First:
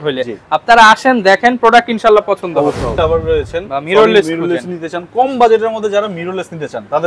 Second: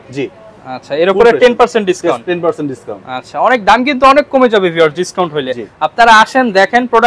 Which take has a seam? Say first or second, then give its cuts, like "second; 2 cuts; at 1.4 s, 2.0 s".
first; 1 cut; at 2.9 s